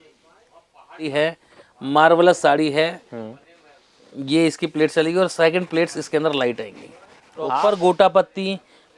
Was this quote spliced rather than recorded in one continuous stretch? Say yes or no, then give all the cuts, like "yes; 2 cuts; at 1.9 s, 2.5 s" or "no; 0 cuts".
yes; 2 cuts; at 1.1 s, 7.5 s